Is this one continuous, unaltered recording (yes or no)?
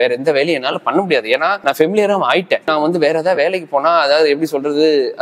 no